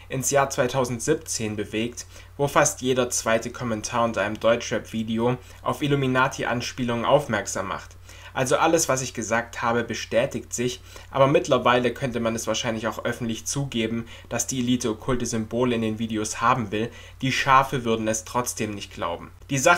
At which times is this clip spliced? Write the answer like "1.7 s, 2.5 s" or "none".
4.9 s